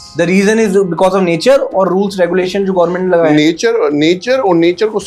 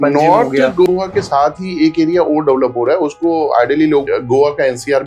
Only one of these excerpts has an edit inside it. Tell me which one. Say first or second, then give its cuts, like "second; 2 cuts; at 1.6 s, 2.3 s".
second; 2 cuts; at 0.9 s, 4.1 s